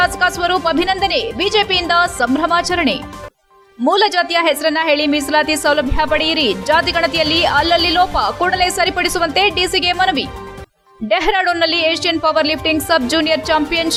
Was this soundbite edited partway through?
no; 0 cuts

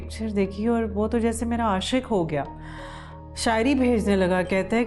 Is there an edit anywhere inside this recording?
no; 0 cuts

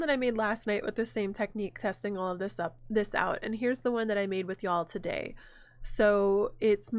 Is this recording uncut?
yes; 0 cuts

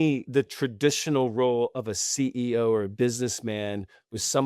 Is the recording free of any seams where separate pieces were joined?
yes; 0 cuts

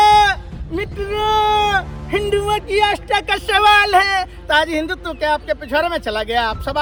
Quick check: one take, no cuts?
yes; 0 cuts

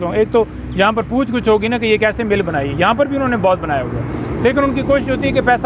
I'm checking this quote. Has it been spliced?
no; 0 cuts

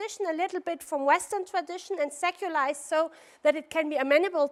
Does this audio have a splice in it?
no; 0 cuts

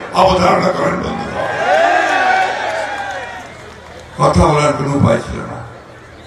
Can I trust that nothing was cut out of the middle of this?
yes; 0 cuts

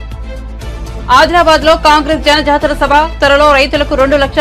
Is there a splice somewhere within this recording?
yes; 1 cut; at 1.0 s

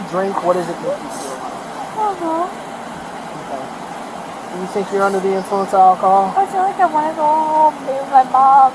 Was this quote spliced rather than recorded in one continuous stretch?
no; 0 cuts

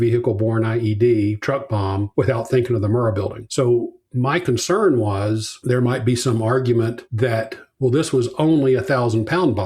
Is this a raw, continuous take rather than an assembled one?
yes; 0 cuts

